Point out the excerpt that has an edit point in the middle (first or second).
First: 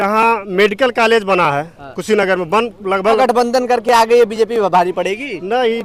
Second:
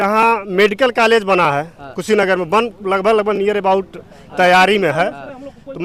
first